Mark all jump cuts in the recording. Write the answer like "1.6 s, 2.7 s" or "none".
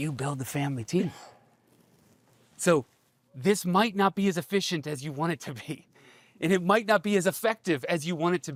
none